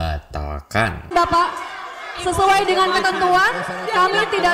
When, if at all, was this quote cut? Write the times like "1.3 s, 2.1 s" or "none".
none